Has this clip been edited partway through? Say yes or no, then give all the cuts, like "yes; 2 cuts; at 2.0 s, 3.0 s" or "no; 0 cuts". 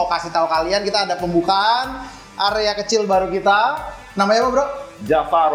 no; 0 cuts